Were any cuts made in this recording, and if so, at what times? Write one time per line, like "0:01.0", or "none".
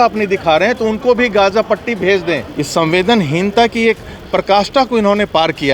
0:02.5